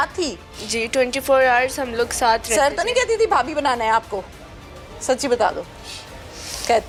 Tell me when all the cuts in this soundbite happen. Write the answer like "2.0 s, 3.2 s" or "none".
none